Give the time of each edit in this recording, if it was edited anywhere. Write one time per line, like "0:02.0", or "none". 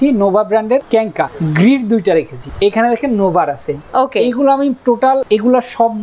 0:00.9
0:02.4
0:05.2